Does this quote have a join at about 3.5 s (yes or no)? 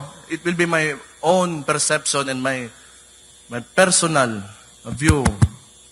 no